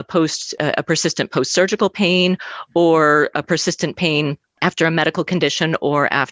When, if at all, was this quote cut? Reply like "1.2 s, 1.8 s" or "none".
4.5 s